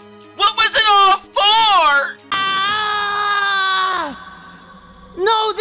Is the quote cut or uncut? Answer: cut